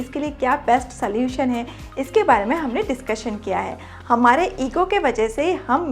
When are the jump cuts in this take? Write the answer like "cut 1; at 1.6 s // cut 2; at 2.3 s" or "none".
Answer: cut 1; at 3.9 s